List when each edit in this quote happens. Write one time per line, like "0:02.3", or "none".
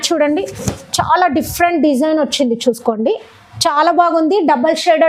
none